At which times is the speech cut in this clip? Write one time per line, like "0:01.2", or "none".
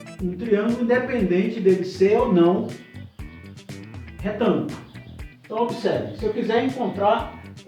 0:02.8
0:04.2